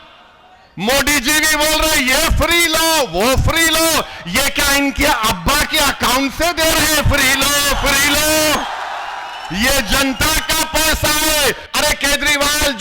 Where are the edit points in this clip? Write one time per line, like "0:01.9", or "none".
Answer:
0:11.6